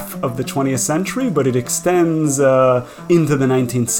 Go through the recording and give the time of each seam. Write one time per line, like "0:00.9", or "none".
0:03.0